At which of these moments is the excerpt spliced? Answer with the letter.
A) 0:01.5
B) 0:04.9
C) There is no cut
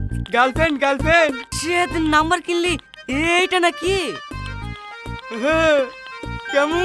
A